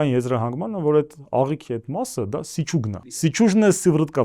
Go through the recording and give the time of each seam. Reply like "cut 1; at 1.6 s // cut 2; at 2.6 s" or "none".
cut 1; at 3.2 s